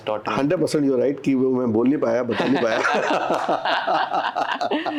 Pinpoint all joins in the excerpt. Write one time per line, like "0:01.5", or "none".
none